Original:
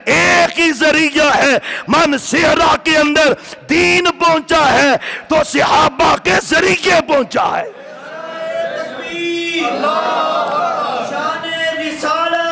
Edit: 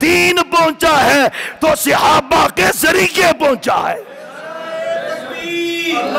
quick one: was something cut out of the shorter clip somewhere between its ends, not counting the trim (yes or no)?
no